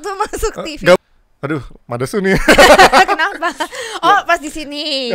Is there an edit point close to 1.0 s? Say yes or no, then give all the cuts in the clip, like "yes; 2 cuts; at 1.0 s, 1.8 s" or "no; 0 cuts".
yes; 1 cut; at 1.0 s